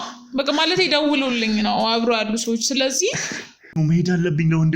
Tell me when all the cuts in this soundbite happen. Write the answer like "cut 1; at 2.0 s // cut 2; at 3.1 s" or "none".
cut 1; at 3.7 s